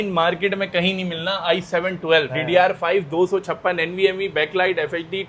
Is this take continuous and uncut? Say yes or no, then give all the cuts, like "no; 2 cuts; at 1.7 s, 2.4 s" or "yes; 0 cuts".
no; 1 cut; at 2.3 s